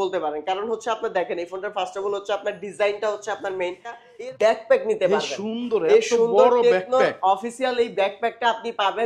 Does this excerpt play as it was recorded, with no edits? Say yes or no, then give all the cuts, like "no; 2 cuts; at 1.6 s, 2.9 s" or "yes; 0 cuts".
no; 1 cut; at 4.1 s